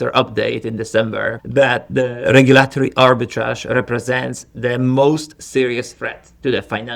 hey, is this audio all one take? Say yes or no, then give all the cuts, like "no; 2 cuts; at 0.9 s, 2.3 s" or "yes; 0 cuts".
no; 1 cut; at 1.4 s